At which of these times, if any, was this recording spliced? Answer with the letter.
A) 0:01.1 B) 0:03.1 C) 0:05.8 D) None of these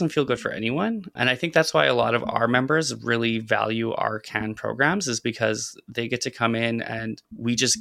A